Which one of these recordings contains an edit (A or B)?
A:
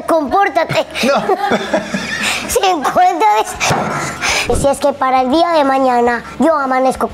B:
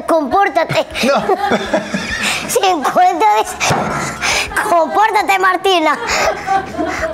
A